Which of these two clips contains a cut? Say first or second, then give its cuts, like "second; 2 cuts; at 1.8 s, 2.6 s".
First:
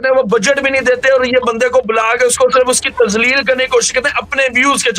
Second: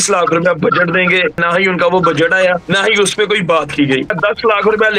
second; 3 cuts; at 1.4 s, 2.6 s, 4.1 s